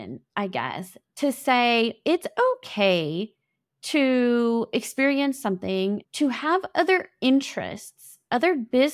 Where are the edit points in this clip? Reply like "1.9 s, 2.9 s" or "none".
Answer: 6.1 s